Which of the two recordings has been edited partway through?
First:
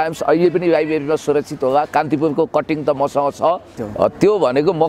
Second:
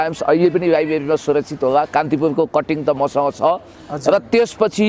first; 1 cut; at 3.8 s

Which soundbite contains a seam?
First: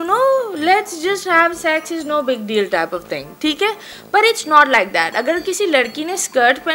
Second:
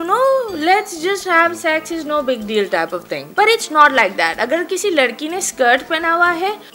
second; 1 cut; at 3.2 s

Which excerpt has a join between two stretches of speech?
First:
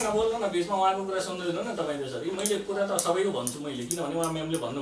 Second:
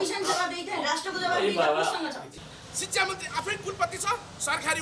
second; 1 cut; at 2.2 s

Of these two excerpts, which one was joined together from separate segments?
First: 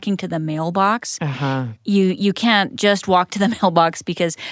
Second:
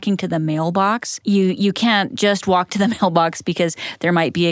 second; 1 cut; at 1.1 s

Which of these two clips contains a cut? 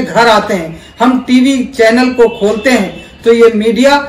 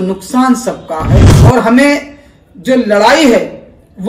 second; 1 cut; at 1.3 s

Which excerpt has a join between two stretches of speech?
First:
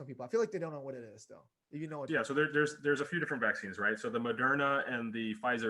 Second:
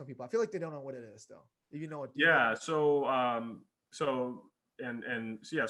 first; 1 cut; at 2.1 s

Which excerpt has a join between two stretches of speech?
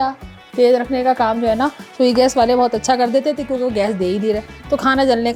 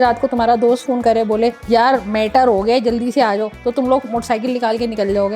second; 1 cut; at 1.6 s

